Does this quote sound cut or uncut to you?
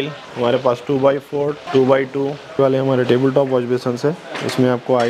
cut